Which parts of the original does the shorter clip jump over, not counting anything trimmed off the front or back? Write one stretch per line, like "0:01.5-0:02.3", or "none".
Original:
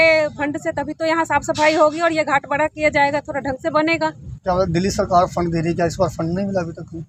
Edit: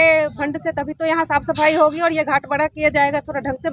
none